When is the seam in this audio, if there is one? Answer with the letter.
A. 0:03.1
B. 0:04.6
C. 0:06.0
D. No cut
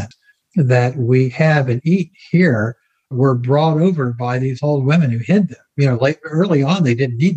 A